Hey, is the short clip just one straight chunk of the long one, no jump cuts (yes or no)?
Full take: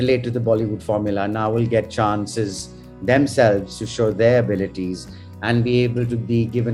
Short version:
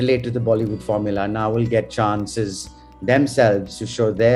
yes